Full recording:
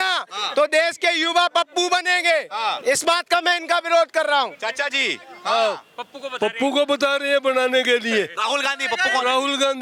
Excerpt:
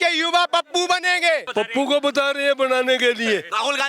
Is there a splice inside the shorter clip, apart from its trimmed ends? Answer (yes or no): yes